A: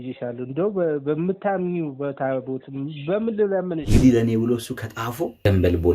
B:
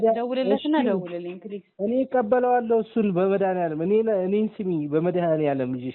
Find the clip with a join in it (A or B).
A